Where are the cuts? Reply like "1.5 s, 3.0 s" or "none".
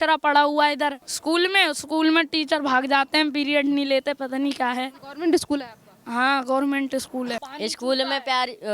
1.1 s, 5.0 s, 7.5 s